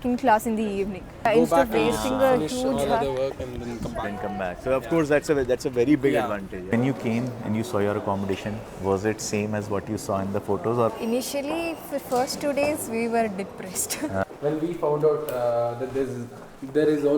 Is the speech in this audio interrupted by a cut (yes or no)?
yes